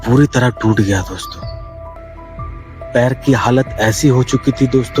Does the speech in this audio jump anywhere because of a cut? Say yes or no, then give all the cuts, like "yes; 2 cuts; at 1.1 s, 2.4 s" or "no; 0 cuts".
yes; 1 cut; at 2.0 s